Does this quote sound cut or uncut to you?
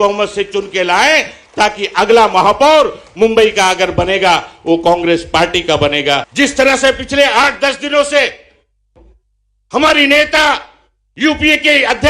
cut